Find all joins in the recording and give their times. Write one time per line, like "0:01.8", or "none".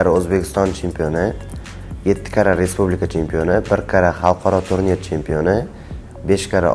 none